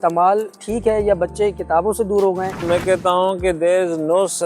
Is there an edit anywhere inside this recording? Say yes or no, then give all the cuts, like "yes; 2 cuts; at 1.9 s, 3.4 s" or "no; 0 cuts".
yes; 1 cut; at 2.6 s